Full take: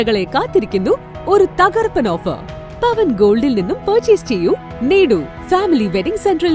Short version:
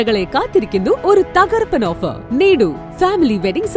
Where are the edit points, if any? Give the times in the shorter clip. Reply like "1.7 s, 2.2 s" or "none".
1.0 s, 2.2 s